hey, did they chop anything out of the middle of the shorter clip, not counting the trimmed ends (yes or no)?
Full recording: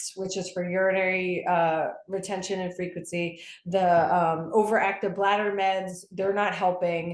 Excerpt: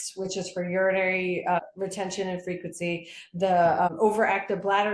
yes